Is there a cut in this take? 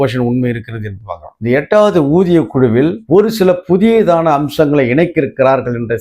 yes; 1 cut; at 1.3 s

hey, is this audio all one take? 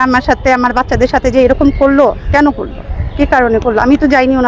yes; 0 cuts

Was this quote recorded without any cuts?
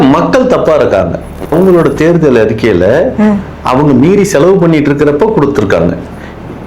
no; 1 cut; at 1.5 s

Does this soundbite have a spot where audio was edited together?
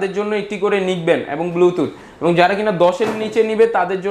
no; 0 cuts

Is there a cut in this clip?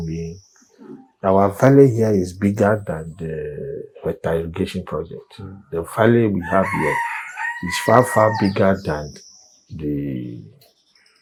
no; 0 cuts

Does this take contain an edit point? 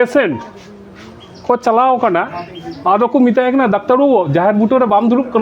no; 0 cuts

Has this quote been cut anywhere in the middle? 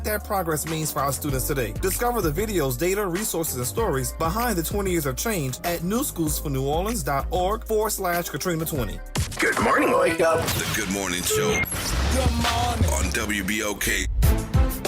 yes; 1 cut; at 9.1 s

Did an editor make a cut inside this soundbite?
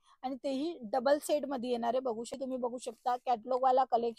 yes; 1 cut; at 2.4 s

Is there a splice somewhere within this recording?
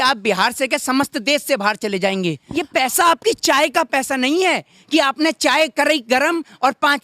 yes; 1 cut; at 2.5 s

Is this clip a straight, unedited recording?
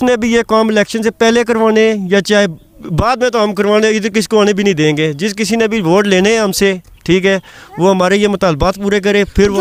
yes; 0 cuts

